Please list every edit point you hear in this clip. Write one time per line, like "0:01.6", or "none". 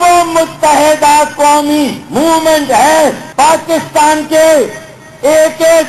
0:03.2
0:04.3